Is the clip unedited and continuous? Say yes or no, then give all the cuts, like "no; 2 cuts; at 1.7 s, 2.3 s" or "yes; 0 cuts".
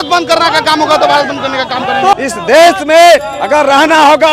no; 1 cut; at 2.1 s